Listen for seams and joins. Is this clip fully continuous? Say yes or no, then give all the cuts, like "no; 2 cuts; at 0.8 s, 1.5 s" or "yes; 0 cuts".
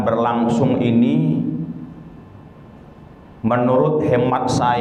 yes; 0 cuts